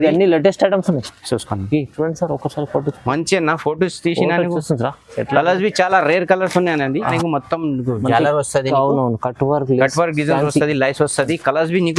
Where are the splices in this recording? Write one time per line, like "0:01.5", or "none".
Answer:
0:07.2